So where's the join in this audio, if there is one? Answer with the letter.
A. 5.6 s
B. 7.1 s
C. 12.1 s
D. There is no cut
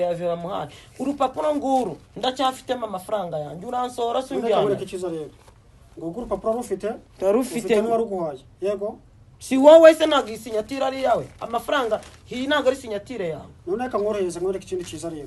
D